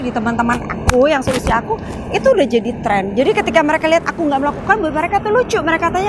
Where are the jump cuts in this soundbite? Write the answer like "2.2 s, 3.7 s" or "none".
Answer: none